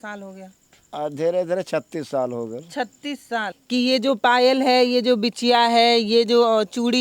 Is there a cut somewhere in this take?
yes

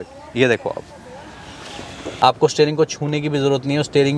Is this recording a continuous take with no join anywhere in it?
no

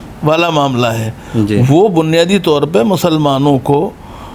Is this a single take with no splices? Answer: yes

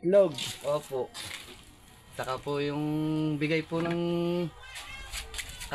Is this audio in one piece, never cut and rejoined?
yes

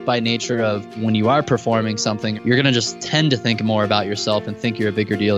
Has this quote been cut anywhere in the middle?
yes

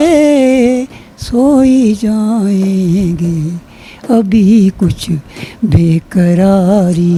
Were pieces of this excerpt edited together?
no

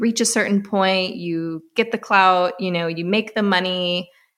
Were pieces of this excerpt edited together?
no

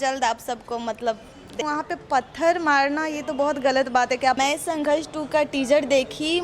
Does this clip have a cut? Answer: yes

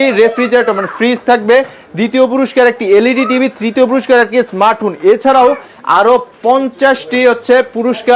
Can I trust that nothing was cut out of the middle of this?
yes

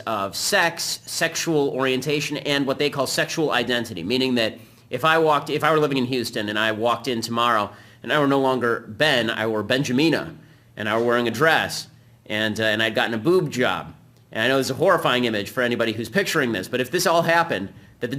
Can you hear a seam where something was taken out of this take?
yes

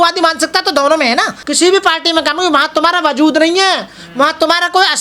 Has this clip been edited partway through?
yes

